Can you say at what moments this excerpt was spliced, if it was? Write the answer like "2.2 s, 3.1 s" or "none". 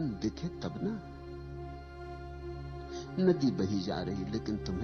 1.0 s, 3.1 s